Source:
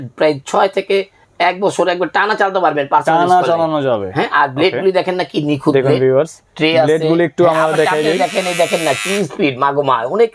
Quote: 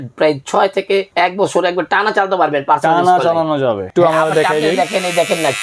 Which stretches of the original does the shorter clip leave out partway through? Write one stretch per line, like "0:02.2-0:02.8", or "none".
0:01.1-0:01.3
0:04.1-0:07.3